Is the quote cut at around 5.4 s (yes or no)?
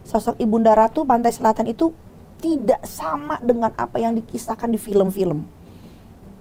no